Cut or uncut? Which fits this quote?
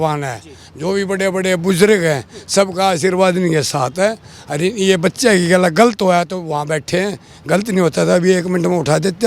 uncut